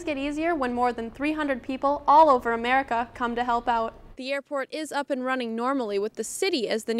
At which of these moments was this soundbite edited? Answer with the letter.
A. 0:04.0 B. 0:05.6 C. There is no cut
A